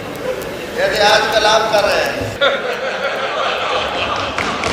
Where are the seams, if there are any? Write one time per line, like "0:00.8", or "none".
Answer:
0:02.4

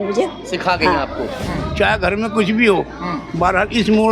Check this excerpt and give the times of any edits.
0:01.4

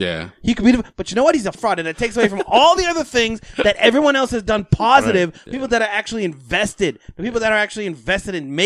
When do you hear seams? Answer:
0:01.5
0:05.4

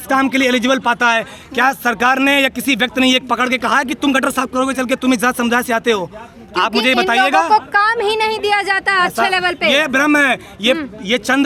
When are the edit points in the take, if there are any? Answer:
none

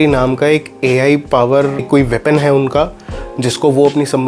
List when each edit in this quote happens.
0:01.9

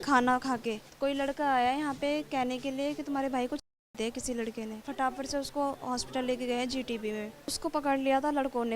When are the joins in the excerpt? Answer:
0:00.9
0:03.8
0:04.8
0:07.6

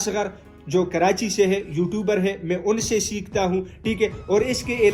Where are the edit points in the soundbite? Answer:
none

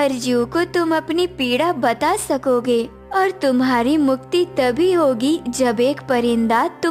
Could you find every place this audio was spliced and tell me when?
none

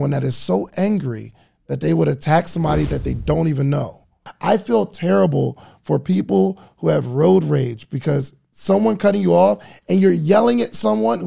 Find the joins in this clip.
0:04.2

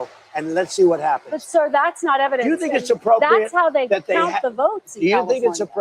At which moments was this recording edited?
none

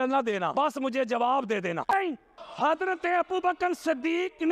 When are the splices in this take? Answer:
0:01.9

